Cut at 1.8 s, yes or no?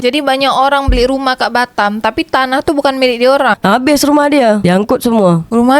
no